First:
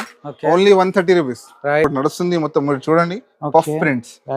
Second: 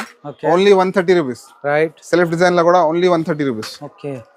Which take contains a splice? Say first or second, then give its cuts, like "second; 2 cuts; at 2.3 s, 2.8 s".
first; 1 cut; at 1.9 s